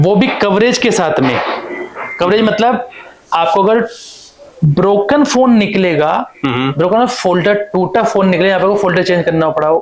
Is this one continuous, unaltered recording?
yes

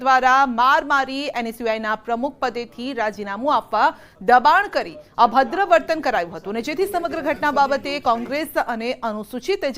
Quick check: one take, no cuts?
no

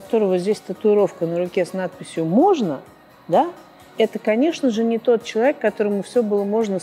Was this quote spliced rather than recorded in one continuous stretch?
no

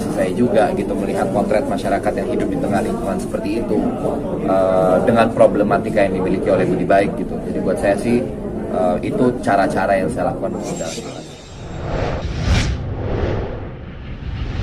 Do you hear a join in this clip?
yes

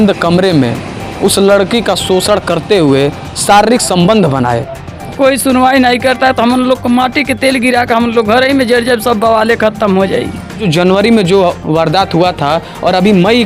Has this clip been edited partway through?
yes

